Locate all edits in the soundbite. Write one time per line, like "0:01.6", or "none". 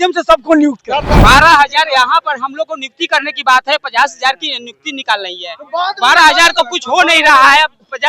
0:01.2